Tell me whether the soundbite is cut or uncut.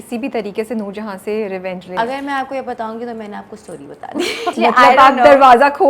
cut